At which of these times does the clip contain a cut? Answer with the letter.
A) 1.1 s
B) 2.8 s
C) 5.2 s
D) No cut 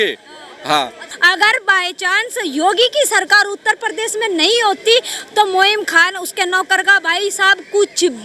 A